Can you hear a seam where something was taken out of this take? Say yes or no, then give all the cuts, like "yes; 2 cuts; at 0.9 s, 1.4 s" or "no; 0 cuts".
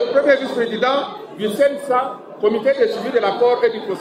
no; 0 cuts